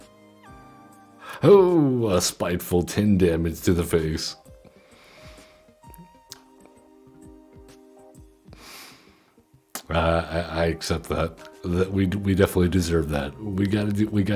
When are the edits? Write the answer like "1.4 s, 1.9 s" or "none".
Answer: 1.3 s